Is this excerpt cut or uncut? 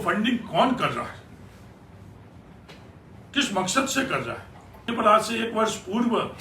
cut